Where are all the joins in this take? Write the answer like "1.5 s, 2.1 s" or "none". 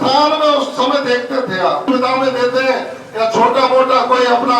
1.9 s